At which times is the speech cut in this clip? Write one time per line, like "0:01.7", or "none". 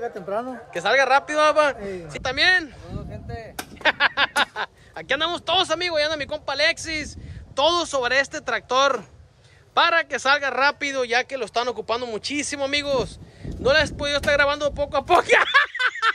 0:02.2